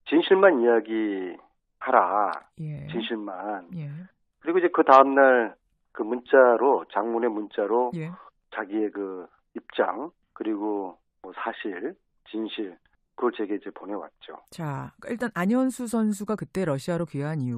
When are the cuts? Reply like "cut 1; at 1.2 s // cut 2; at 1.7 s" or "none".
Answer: none